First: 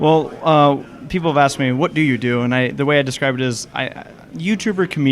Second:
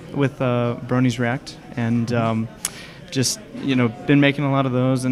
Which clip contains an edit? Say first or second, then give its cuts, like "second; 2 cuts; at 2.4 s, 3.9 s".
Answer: first; 1 cut; at 2.6 s